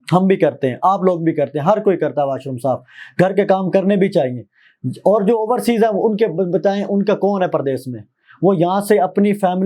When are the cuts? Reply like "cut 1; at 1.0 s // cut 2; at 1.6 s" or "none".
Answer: none